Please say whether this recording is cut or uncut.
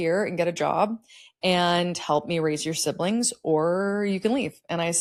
uncut